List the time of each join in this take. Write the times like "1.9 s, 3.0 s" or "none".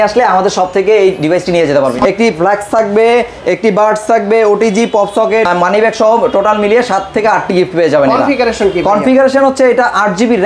2.0 s, 5.5 s